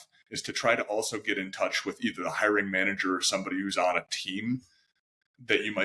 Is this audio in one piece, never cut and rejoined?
yes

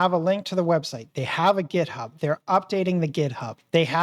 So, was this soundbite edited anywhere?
no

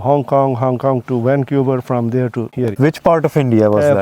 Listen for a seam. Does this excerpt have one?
yes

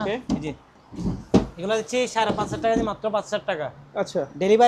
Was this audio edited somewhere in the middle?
no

